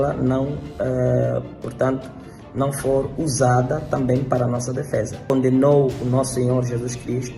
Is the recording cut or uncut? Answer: cut